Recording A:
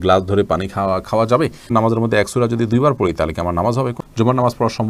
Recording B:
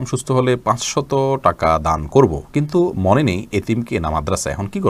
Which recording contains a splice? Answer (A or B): A